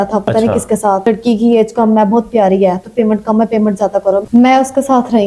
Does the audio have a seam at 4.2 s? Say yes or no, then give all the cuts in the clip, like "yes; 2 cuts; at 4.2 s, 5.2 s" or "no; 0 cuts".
yes; 1 cut; at 4.2 s